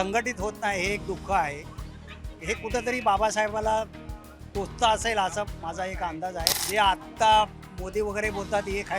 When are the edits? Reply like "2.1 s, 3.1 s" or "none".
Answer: 6.6 s